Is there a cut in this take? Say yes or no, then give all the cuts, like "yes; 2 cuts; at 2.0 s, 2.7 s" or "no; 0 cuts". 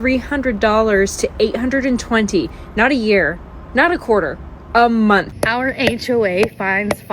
yes; 1 cut; at 5.3 s